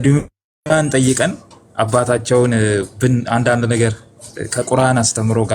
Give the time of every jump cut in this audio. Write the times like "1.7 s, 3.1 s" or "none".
none